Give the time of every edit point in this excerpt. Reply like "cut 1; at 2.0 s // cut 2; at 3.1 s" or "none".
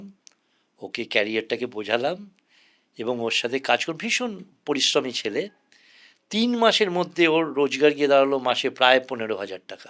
none